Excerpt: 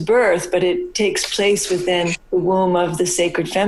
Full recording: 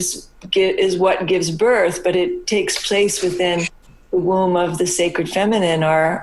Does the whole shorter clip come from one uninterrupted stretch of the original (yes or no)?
no